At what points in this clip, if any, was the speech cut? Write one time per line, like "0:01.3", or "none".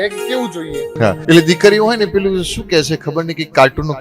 0:01.1